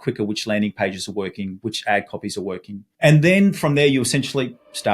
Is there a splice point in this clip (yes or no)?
yes